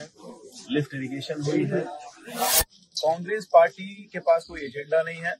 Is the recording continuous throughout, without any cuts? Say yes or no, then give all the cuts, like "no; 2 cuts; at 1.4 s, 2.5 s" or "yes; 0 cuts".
no; 1 cut; at 2.8 s